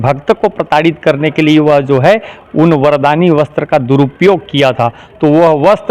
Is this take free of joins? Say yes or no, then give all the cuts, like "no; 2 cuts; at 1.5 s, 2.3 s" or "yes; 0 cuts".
yes; 0 cuts